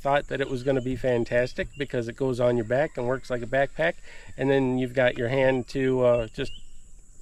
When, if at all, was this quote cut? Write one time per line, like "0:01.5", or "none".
none

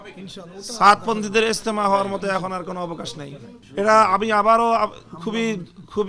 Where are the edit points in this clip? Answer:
0:03.6

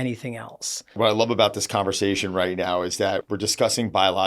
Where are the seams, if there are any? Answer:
0:01.0
0:03.2

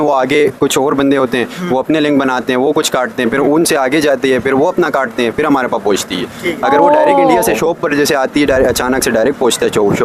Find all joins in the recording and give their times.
none

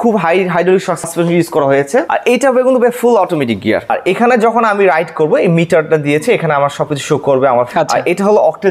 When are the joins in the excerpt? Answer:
0:01.1
0:02.1
0:03.9
0:07.7

